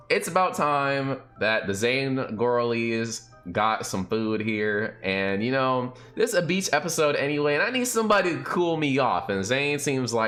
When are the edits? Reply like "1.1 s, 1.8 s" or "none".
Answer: none